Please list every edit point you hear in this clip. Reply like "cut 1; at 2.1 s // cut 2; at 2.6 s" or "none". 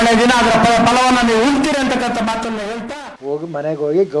cut 1; at 2.9 s